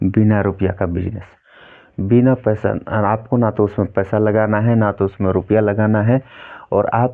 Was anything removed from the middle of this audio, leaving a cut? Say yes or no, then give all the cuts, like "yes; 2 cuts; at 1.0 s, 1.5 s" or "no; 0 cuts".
no; 0 cuts